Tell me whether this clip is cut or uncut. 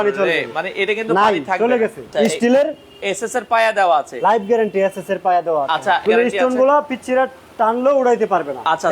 cut